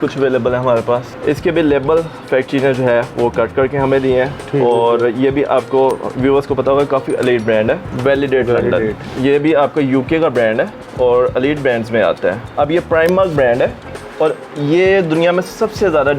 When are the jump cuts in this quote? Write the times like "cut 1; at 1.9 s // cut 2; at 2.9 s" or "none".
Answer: cut 1; at 1.1 s // cut 2; at 7.9 s // cut 3; at 12.5 s